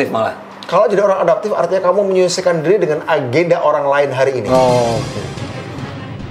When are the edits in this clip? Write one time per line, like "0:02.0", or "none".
0:04.9